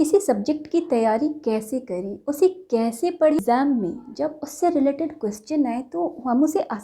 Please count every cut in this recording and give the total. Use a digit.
1